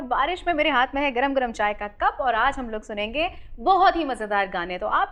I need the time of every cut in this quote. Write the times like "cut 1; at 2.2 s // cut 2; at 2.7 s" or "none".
none